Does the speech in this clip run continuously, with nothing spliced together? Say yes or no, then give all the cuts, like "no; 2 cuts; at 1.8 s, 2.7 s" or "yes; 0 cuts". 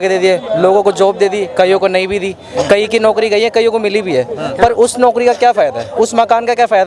yes; 0 cuts